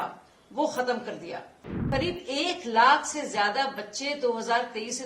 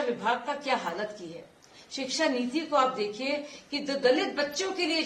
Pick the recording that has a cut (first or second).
first